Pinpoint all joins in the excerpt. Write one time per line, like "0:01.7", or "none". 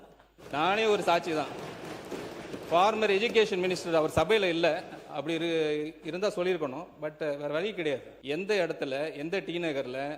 0:08.1